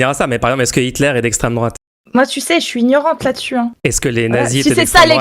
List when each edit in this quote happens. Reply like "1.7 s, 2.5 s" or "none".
1.9 s, 3.7 s